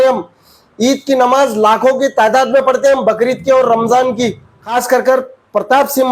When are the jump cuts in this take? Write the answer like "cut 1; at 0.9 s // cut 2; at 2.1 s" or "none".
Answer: cut 1; at 4.5 s